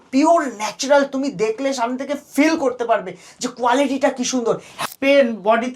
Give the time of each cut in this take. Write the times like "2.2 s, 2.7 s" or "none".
4.7 s